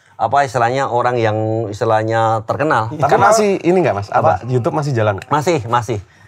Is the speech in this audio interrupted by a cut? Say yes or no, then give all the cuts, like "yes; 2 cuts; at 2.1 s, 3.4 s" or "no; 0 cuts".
yes; 1 cut; at 2.9 s